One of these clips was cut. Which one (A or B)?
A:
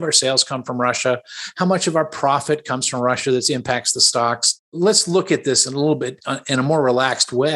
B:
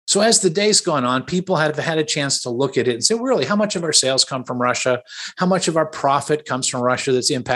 A